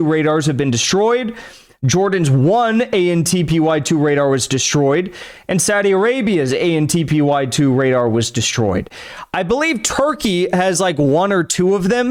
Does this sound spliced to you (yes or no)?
no